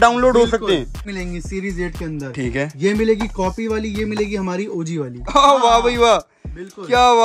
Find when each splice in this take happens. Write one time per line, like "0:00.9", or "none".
0:01.0
0:05.3